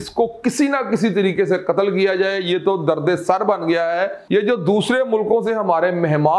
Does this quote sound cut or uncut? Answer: cut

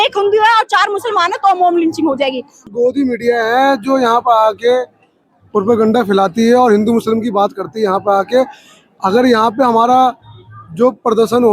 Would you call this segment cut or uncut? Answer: cut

